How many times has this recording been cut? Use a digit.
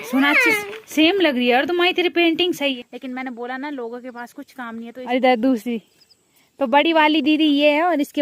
2